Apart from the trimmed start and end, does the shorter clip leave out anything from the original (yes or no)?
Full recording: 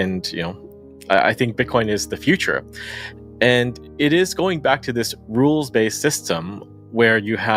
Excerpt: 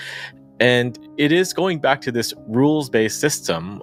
no